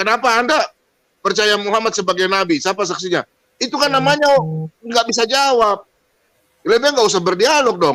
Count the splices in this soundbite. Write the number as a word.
zero